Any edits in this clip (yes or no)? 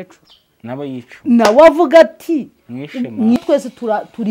yes